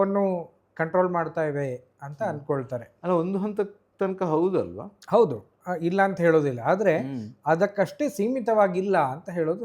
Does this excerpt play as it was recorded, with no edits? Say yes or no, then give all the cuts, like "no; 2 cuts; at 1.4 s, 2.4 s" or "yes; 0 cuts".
yes; 0 cuts